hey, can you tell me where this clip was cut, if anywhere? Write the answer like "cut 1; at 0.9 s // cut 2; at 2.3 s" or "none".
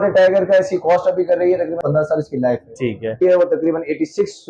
cut 1; at 1.8 s // cut 2; at 3.2 s